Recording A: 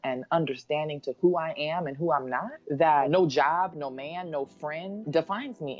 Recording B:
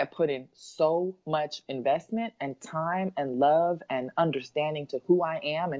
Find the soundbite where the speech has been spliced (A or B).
A